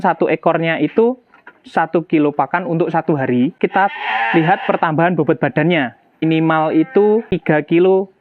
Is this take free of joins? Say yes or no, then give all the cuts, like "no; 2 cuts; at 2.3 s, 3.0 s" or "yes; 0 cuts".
no; 3 cuts; at 3.6 s, 6.2 s, 7.3 s